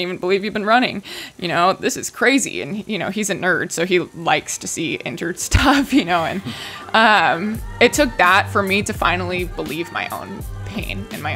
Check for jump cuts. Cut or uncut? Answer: uncut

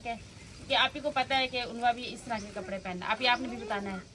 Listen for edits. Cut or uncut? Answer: uncut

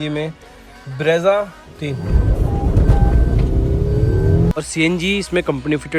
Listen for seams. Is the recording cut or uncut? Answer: cut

